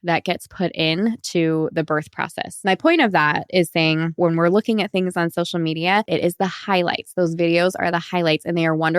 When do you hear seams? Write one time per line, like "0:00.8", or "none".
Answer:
0:02.4
0:04.2
0:06.1